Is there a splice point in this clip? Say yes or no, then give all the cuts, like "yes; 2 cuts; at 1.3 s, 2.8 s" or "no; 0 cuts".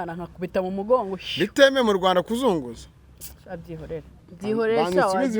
yes; 1 cut; at 4.2 s